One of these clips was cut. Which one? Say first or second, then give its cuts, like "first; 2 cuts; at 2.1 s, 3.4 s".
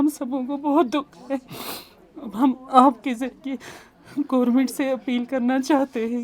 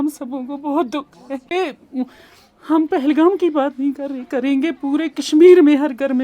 second; 1 cut; at 1.5 s